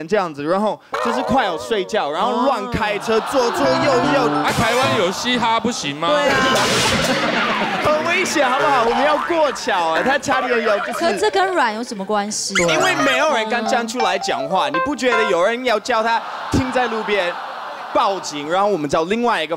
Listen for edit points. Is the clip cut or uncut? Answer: uncut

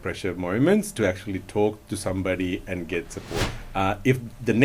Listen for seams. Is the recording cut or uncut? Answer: cut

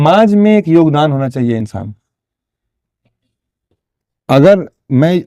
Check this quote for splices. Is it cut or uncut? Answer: uncut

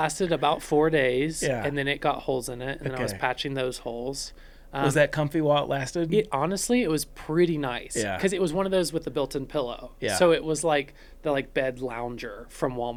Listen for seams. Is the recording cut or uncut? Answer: uncut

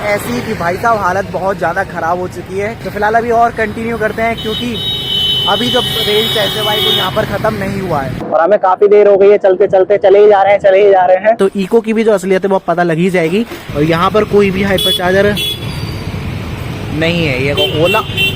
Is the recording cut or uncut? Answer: cut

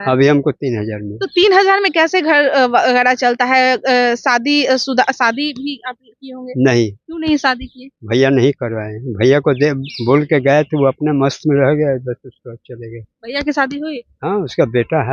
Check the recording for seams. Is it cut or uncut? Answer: uncut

